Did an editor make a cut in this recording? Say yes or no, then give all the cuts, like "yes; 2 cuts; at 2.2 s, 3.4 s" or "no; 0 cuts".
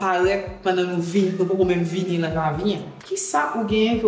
yes; 1 cut; at 3.1 s